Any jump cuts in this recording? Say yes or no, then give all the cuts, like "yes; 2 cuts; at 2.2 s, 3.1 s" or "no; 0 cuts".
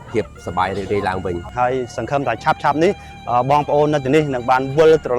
yes; 1 cut; at 1.5 s